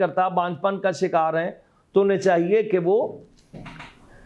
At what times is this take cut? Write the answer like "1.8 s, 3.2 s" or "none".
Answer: none

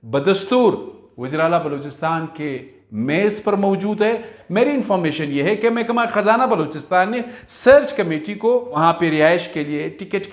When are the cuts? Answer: 4.4 s, 8.7 s

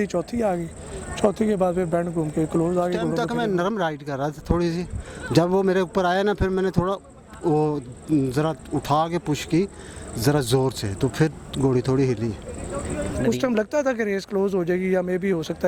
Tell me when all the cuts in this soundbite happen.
3.2 s, 13.1 s

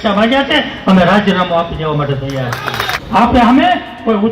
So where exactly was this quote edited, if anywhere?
2.9 s

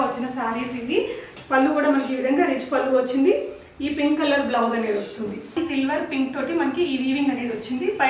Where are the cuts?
1.3 s, 5.5 s

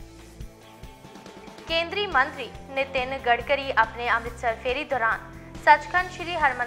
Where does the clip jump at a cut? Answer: 1.1 s

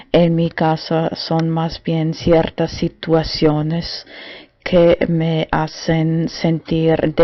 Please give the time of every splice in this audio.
3.6 s

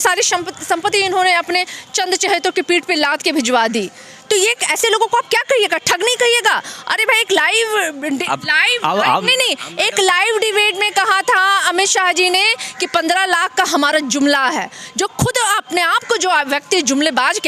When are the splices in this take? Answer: none

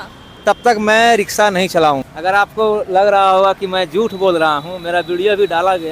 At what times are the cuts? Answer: 2.0 s

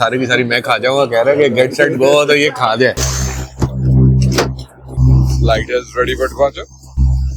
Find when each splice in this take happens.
3.1 s

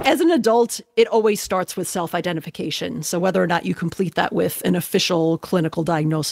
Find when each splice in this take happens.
none

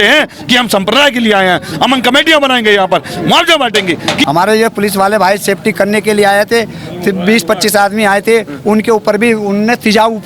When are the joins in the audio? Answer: 4.2 s

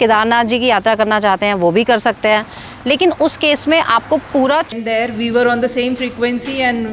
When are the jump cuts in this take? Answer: 4.7 s

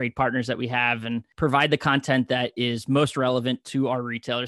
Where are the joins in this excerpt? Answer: 1.3 s

